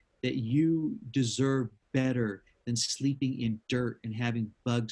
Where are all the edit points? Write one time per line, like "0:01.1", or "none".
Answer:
none

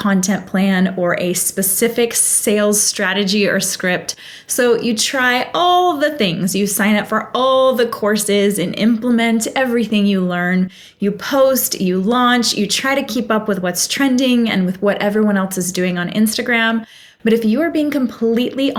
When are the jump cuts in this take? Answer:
none

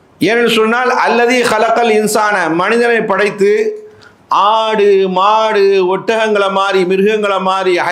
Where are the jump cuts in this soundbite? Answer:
none

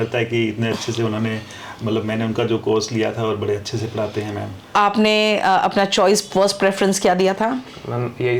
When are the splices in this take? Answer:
0:04.7

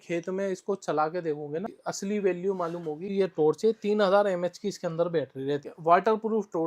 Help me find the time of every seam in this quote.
0:01.8
0:03.1
0:05.6

